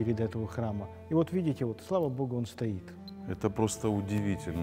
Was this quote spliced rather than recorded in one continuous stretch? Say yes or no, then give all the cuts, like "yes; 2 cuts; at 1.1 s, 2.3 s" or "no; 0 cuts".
yes; 1 cut; at 2.9 s